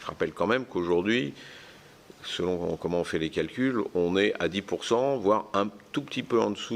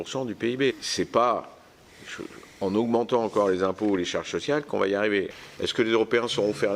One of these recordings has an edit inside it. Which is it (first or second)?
second